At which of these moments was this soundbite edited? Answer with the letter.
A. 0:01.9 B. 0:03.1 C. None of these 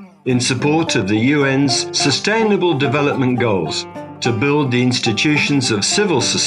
A